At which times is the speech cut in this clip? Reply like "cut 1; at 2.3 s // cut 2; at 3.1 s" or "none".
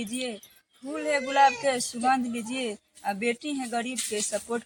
none